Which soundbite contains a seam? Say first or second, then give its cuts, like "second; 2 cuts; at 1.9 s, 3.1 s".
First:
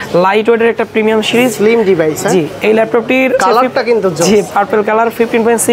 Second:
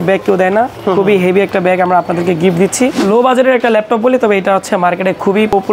second; 1 cut; at 3.0 s